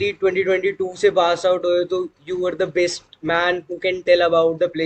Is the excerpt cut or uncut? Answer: uncut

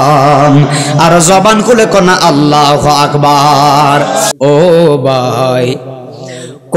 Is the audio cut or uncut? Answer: cut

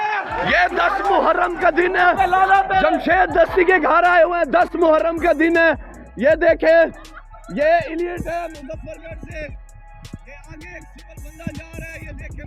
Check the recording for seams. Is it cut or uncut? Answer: uncut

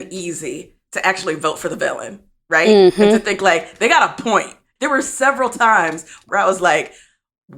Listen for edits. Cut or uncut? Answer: cut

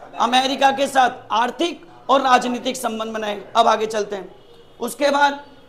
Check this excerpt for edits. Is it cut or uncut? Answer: uncut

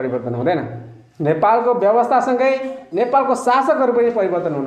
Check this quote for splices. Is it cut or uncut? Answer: uncut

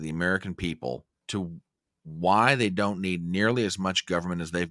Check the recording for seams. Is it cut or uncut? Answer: cut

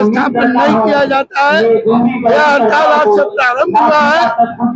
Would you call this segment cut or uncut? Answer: uncut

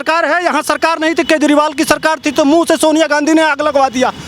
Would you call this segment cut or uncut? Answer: uncut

